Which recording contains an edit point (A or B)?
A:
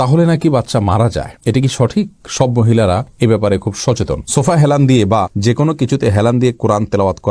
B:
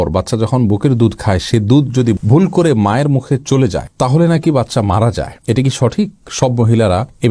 A